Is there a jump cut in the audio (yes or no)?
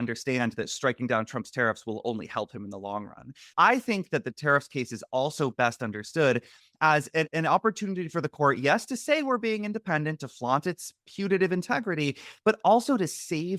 yes